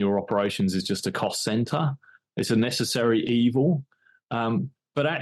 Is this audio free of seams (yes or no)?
yes